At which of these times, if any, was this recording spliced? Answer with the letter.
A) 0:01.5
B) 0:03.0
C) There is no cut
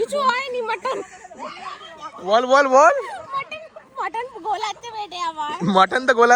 C